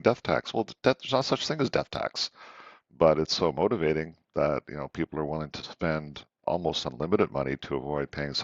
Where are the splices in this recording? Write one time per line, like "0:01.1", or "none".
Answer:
none

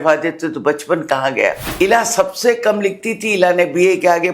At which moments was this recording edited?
0:01.7

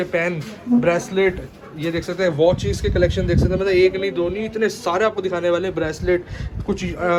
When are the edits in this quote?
none

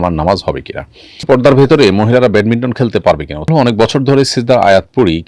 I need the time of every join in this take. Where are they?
0:01.2
0:03.5

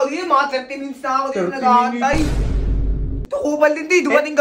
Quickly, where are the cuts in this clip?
0:02.7

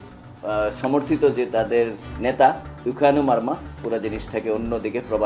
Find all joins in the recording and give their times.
0:03.8

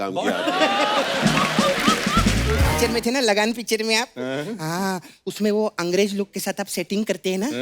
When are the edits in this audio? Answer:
0:02.7

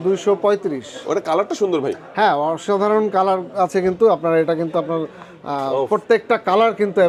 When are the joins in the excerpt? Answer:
none

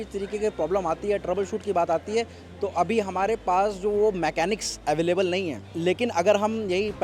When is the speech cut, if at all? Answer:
0:05.6

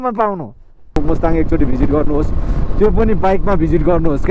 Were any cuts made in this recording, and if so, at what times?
0:01.0

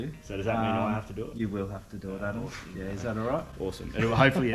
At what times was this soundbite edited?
none

